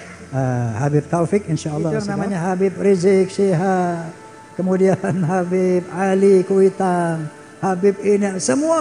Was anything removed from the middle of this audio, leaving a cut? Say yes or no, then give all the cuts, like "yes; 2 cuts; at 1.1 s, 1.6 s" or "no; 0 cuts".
yes; 1 cut; at 2.1 s